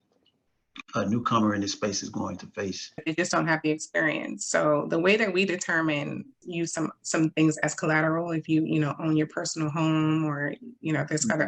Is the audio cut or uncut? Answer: cut